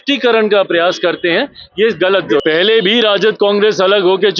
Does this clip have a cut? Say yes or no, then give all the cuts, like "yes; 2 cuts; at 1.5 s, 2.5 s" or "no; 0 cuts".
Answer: yes; 1 cut; at 2.4 s